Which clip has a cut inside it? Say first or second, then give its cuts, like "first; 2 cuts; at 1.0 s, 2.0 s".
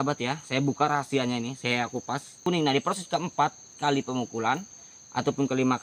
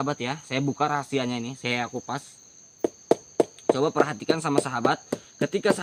first; 1 cut; at 2.4 s